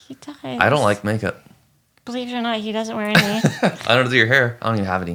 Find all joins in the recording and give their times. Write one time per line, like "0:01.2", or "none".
none